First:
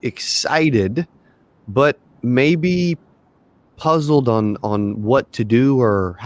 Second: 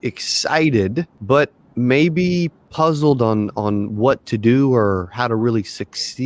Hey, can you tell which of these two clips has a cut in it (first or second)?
second